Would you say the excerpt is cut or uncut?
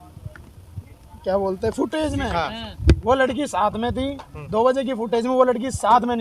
uncut